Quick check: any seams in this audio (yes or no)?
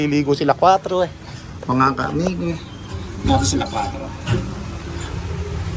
no